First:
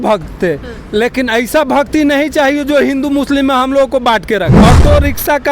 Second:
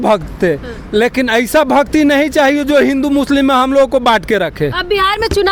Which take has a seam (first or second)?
first